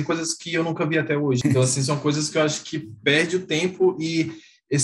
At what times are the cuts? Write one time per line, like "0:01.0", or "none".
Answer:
0:01.4